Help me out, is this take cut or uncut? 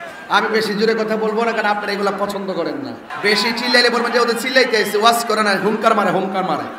cut